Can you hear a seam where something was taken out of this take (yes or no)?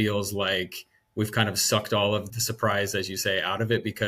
yes